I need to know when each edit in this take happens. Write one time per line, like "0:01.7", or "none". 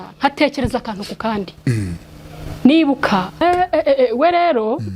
0:03.3